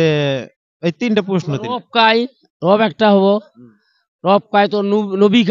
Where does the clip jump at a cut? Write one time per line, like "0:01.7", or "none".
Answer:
none